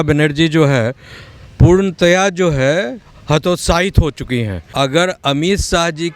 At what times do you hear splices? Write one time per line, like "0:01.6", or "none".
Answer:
0:04.7